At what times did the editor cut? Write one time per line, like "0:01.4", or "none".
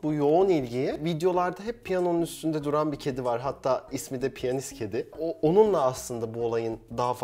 0:01.0
0:05.2